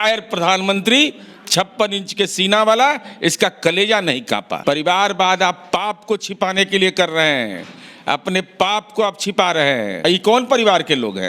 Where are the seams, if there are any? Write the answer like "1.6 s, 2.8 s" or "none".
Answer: 4.5 s, 10.0 s